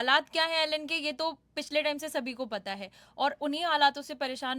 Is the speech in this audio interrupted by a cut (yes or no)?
no